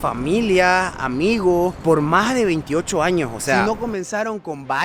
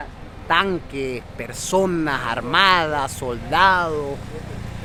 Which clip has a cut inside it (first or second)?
first